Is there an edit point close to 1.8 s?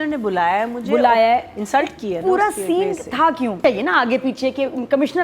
no; 1 cut; at 3.6 s

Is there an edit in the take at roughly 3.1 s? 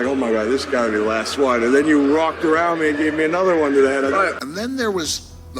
no; 1 cut; at 4.4 s

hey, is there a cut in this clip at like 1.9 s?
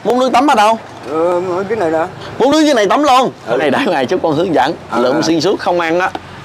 no; 1 cut; at 3.6 s

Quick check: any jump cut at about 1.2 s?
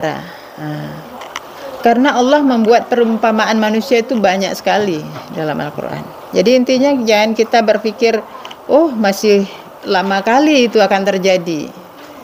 yes; 1 cut; at 1.2 s

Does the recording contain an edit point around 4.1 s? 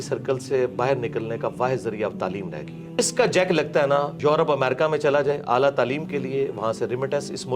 yes; 2 cuts; at 3.0 s, 4.1 s

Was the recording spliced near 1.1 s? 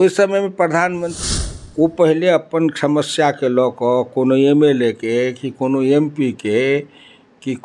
yes; 1 cut; at 1.1 s

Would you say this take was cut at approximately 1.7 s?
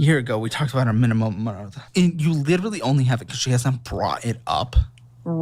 yes; 1 cut; at 1.7 s

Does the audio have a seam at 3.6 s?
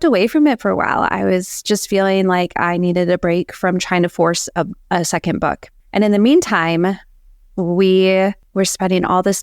no; 2 cuts; at 5.7 s, 8.4 s

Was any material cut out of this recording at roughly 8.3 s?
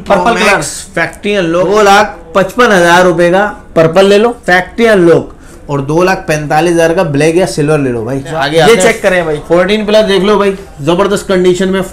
yes; 3 cuts; at 1.6 s, 4.4 s, 8.3 s

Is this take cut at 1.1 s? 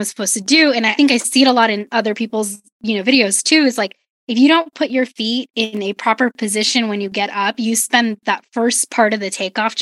yes; 1 cut; at 1.1 s

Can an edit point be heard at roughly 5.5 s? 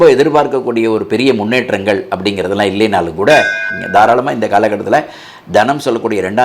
no; 1 cut; at 3.7 s

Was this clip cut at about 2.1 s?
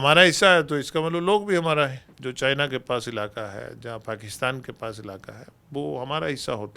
yes; 1 cut; at 2.1 s

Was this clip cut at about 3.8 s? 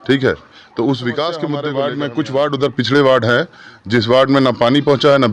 no; 1 cut; at 1.6 s

